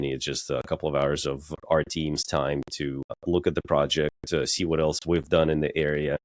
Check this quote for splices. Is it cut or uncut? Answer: cut